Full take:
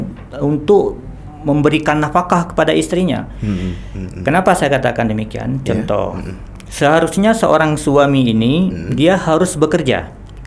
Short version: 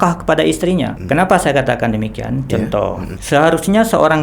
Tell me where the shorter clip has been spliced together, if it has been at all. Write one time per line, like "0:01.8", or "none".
0:01.0
0:03.1